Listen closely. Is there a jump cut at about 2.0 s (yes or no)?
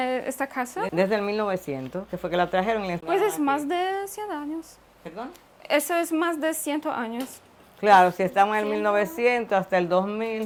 no